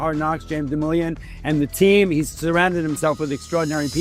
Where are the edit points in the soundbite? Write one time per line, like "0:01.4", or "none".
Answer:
none